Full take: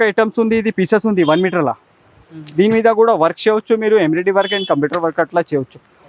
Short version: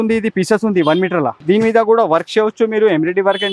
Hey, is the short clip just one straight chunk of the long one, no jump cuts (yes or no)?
no